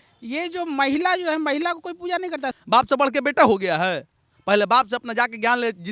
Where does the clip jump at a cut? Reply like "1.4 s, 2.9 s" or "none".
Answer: 2.5 s